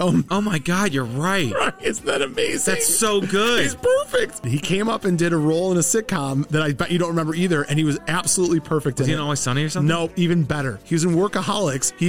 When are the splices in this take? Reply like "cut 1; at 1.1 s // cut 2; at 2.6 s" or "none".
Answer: cut 1; at 4.5 s